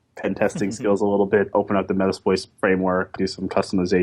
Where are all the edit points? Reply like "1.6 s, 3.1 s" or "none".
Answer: 1.5 s, 3.1 s